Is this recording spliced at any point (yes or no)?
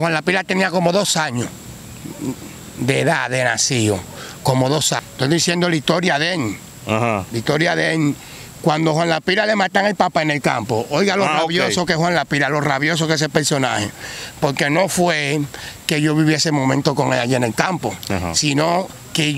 no